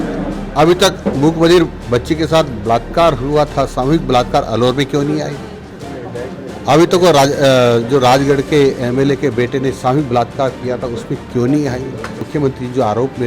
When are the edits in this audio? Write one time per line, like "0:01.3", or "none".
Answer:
0:12.3